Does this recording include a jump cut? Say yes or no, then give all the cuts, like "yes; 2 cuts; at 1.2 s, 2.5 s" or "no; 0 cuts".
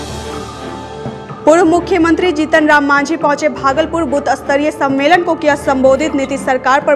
no; 0 cuts